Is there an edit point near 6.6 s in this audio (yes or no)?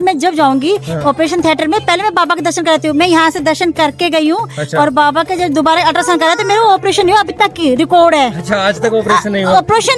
no